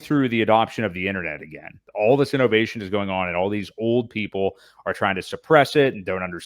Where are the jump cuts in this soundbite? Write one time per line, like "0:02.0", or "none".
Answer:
0:01.8